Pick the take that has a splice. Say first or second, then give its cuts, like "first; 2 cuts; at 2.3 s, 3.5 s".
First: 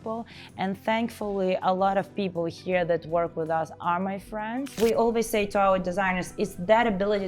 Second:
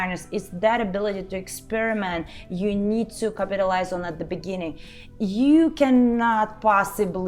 first; 1 cut; at 4.7 s